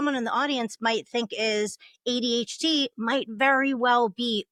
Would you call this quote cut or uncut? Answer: uncut